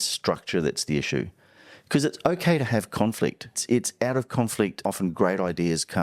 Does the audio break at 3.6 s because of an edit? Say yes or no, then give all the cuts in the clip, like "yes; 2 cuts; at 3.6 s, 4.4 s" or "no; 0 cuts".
yes; 2 cuts; at 3.6 s, 4.8 s